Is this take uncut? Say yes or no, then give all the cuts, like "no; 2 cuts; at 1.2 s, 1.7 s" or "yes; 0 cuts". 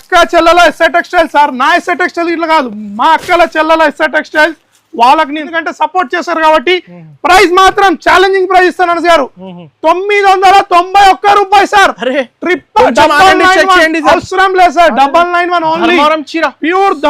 no; 1 cut; at 5.4 s